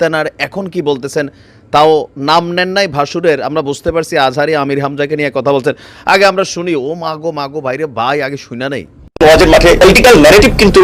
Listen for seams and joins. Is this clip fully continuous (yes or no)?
yes